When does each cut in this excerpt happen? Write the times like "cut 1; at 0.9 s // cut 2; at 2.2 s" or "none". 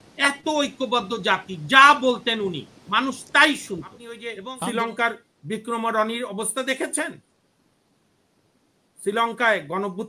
cut 1; at 4.3 s